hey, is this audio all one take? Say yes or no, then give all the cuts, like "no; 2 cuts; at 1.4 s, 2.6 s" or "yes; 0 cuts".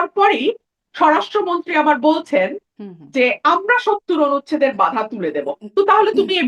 yes; 0 cuts